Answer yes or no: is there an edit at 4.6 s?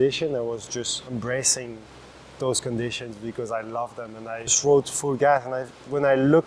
yes